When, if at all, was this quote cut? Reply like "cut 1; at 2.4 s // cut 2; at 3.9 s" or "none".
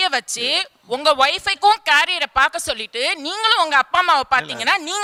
none